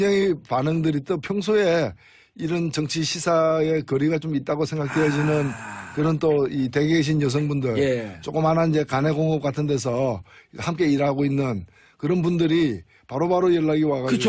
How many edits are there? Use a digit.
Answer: 1